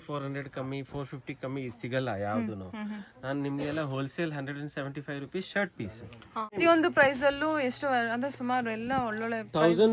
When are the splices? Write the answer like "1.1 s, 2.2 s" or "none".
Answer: 6.6 s